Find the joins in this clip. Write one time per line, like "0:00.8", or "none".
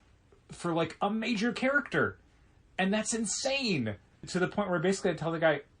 0:04.3

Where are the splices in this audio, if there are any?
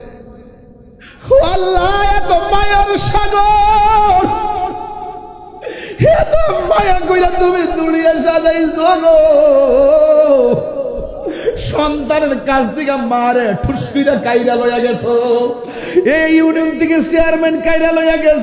none

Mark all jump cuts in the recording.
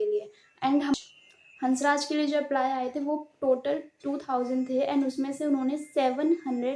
0:01.0

